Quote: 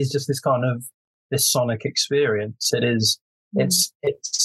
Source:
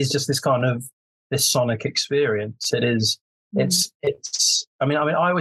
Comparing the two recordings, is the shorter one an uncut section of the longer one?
yes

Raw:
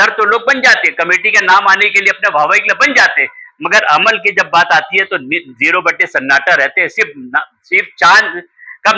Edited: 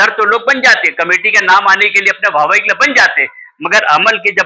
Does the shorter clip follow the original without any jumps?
yes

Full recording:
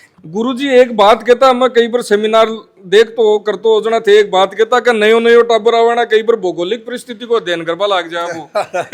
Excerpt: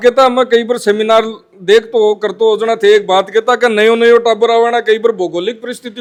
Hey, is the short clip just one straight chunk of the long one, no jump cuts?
yes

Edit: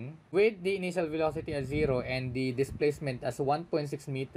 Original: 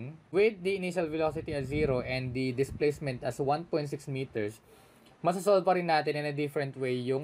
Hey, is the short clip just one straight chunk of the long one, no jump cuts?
yes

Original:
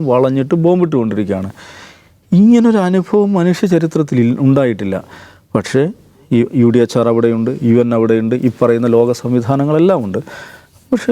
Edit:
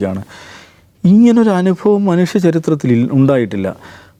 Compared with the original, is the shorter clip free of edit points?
yes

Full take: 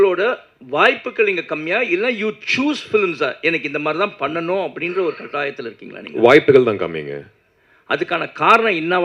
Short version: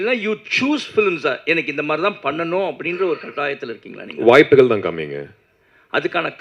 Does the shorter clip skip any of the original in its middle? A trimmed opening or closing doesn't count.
no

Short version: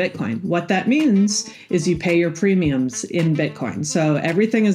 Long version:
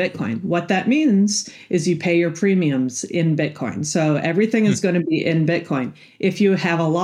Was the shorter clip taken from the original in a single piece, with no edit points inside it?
yes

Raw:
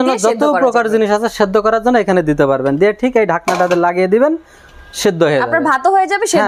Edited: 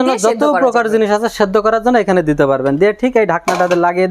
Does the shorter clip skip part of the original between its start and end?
no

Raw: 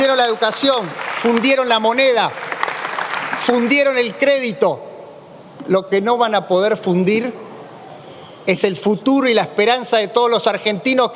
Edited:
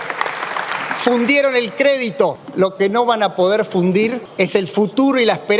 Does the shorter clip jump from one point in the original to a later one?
yes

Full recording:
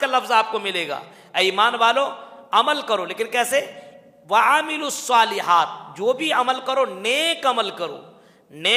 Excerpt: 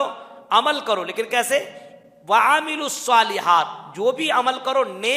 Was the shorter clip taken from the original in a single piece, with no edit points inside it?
yes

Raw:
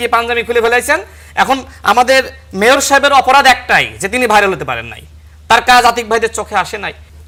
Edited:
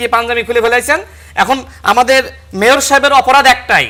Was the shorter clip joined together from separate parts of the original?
no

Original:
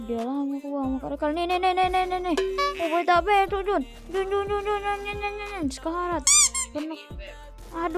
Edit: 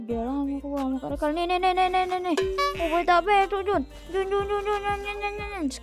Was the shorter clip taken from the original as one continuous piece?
yes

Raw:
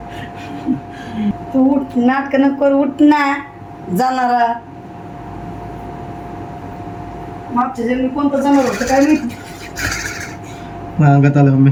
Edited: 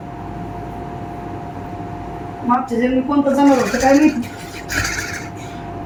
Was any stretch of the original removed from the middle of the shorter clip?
no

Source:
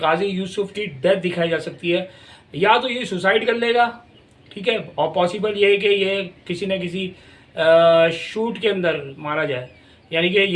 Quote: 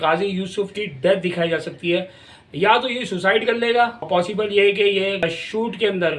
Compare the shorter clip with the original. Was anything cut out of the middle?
yes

